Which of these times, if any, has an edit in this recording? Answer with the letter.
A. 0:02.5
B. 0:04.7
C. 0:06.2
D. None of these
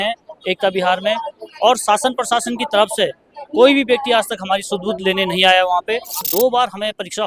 C